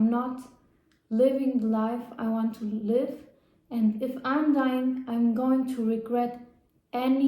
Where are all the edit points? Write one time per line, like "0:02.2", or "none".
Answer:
none